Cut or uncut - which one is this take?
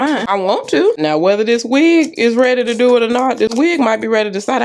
uncut